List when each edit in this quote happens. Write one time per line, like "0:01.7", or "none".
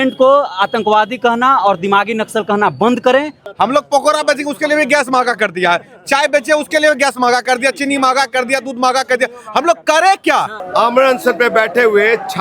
0:03.4
0:10.6